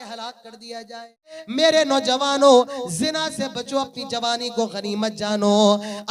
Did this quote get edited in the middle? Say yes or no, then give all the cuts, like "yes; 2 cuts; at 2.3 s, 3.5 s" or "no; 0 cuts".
yes; 1 cut; at 1.4 s